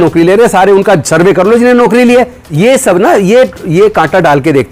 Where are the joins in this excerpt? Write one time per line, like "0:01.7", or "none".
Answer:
0:02.5